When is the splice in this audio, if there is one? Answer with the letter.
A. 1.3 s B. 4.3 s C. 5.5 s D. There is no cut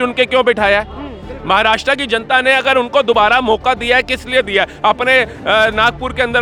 D